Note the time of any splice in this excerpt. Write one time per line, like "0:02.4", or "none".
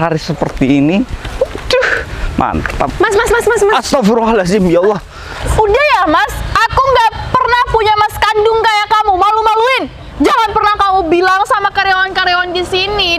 0:05.4